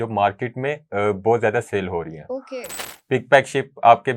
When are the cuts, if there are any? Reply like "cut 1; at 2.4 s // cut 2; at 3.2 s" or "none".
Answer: cut 1; at 2.8 s